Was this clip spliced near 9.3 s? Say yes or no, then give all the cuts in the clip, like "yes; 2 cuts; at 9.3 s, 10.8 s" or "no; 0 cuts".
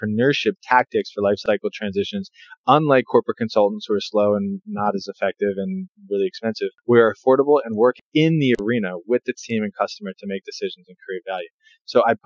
no; 4 cuts; at 1.4 s, 5.9 s, 6.8 s, 8.0 s